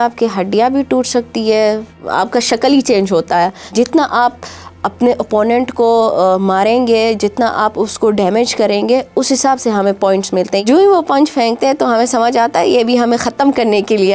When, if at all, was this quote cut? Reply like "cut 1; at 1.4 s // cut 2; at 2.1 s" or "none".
cut 1; at 3.7 s // cut 2; at 10.6 s